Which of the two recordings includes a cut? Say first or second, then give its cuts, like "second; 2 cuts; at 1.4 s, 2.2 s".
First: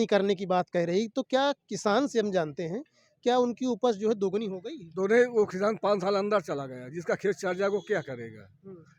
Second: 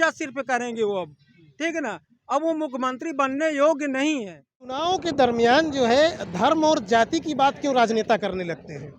second; 1 cut; at 4.8 s